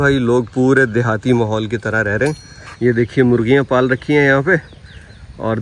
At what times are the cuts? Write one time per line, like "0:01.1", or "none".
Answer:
none